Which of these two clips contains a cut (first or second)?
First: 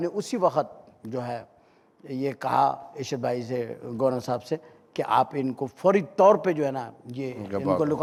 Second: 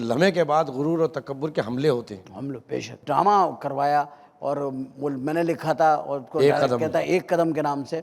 second